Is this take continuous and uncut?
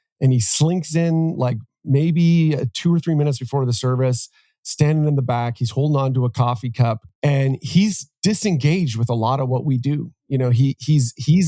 no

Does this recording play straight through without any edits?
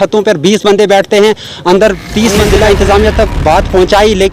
no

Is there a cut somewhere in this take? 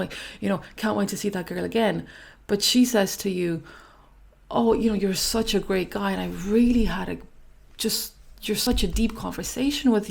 yes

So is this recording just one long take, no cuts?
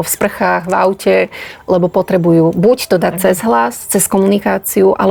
yes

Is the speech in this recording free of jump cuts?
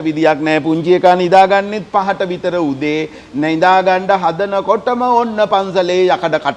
yes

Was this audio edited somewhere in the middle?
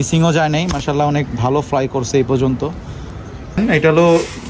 yes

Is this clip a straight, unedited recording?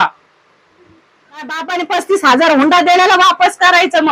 no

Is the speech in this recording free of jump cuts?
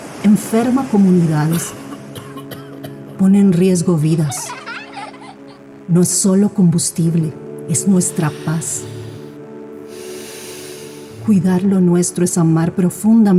yes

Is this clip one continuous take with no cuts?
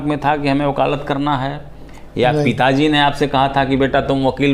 yes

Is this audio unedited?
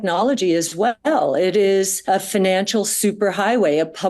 no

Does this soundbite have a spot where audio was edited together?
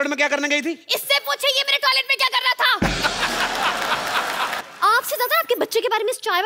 yes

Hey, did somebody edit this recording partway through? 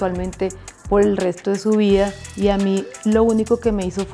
no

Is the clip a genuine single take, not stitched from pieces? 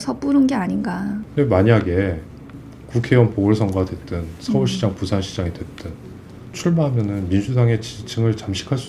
no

